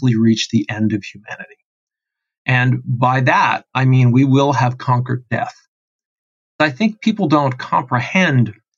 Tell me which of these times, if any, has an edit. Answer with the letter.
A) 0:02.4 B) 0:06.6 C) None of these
B